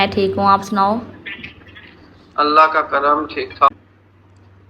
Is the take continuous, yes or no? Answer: no